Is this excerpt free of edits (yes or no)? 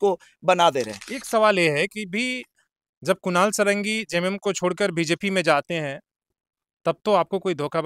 no